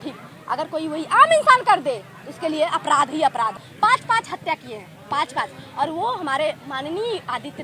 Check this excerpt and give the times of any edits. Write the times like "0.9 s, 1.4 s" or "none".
3.7 s